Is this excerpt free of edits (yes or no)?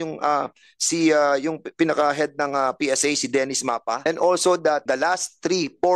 no